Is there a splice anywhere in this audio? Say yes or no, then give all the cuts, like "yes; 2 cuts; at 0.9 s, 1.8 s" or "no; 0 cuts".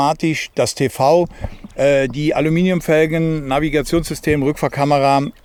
no; 0 cuts